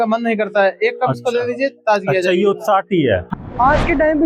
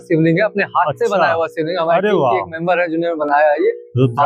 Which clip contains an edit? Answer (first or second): first